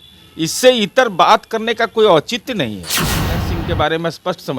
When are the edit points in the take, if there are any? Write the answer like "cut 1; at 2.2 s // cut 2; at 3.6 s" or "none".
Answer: cut 1; at 3.4 s